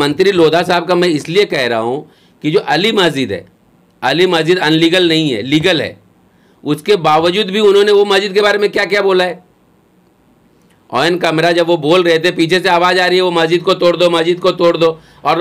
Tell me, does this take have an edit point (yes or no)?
no